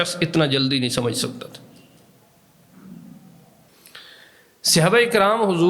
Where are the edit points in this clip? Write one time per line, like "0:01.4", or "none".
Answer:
0:03.7